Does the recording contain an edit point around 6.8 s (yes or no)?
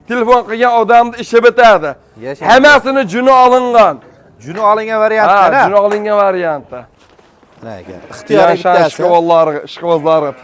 yes